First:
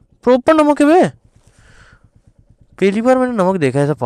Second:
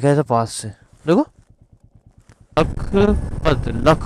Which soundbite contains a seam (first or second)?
second